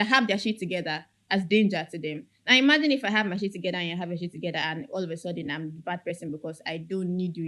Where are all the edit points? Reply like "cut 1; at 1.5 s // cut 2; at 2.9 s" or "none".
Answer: none